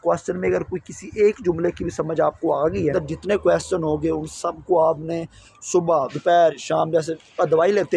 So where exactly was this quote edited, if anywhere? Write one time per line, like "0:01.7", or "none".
0:02.9